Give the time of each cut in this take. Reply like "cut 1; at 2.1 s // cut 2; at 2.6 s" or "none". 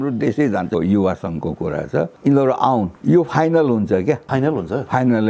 cut 1; at 0.7 s // cut 2; at 2.1 s // cut 3; at 2.9 s // cut 4; at 4.2 s